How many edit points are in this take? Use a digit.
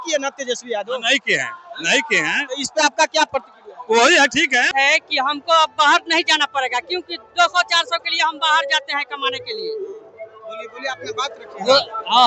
1